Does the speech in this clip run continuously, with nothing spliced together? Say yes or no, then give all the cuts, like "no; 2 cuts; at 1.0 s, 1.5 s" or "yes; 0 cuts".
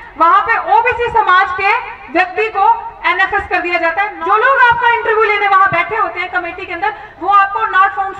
no; 1 cut; at 4.1 s